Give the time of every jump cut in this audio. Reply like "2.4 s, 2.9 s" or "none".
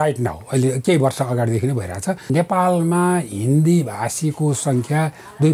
2.2 s